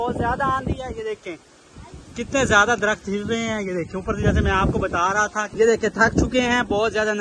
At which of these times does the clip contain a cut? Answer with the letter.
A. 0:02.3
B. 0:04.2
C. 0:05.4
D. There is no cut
C